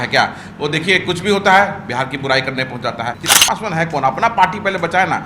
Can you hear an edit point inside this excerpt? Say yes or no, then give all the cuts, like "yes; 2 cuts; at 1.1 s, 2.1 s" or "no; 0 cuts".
yes; 1 cut; at 3.2 s